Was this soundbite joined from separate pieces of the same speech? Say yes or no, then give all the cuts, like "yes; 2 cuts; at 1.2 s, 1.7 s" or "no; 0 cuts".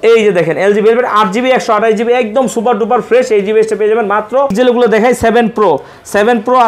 yes; 1 cut; at 4.5 s